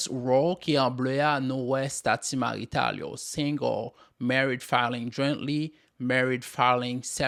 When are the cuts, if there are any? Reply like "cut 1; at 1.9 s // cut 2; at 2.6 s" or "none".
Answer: none